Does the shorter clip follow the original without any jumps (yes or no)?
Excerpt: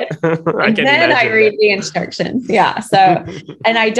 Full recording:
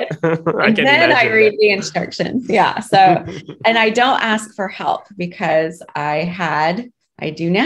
yes